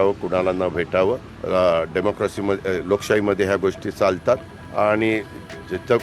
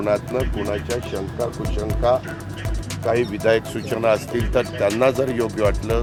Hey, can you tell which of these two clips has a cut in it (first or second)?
first